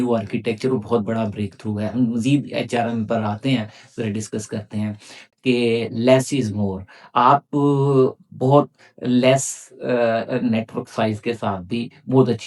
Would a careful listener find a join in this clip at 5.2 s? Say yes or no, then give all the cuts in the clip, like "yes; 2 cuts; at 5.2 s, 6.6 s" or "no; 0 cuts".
yes; 1 cut; at 5.2 s